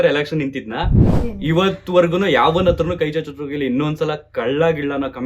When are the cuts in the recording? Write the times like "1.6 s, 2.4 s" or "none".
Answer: 1.1 s